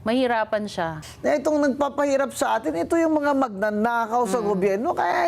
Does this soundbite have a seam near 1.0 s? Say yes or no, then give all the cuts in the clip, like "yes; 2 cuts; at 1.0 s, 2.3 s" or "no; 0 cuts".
yes; 1 cut; at 1.0 s